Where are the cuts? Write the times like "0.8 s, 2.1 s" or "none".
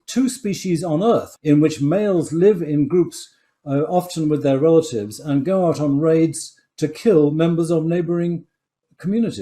1.3 s